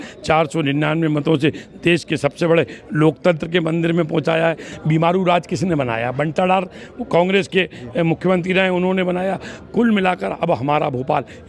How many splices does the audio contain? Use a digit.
1